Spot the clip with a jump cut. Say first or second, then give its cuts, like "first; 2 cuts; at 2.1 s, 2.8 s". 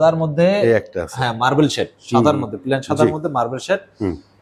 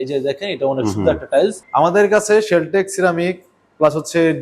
second; 1 cut; at 1.6 s